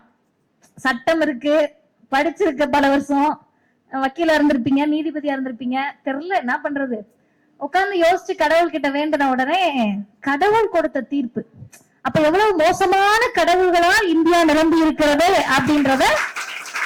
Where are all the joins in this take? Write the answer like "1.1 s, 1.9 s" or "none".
none